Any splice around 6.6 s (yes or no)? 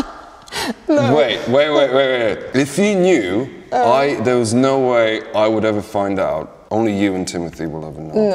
yes